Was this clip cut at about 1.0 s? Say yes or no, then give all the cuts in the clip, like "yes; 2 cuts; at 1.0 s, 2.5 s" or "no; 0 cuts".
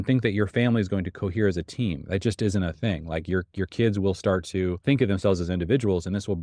no; 1 cut; at 4.8 s